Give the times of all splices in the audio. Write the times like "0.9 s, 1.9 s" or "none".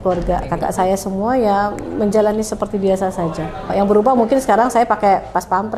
3.7 s